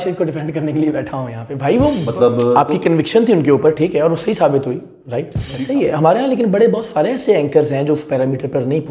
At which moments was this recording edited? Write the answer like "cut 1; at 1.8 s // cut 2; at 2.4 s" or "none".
cut 1; at 2.0 s // cut 2; at 5.5 s